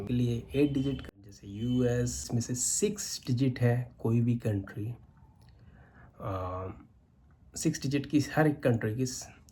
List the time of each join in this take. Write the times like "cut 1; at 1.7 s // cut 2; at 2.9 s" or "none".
cut 1; at 1.0 s // cut 2; at 2.3 s